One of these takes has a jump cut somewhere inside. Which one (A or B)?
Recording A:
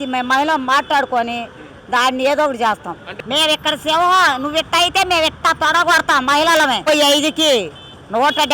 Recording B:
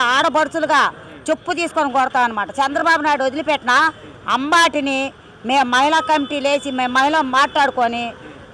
A